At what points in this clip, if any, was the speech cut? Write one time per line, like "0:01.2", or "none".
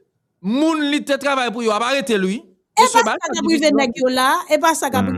none